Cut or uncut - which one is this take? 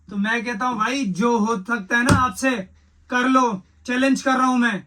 uncut